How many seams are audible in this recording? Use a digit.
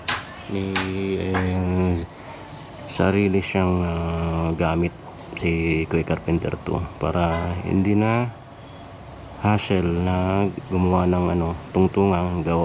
0